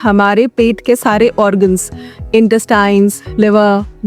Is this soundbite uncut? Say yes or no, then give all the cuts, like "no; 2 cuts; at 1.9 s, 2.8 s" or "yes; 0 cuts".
yes; 0 cuts